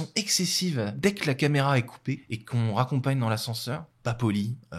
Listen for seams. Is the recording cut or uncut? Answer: cut